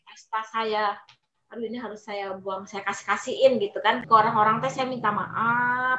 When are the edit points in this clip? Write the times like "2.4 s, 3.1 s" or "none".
4.0 s